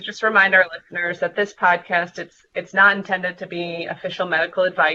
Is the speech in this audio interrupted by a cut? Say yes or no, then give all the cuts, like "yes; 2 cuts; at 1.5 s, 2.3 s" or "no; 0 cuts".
no; 0 cuts